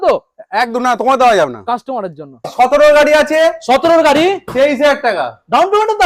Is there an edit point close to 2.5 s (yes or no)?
yes